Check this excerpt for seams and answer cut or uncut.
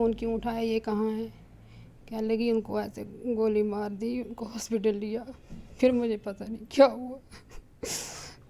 uncut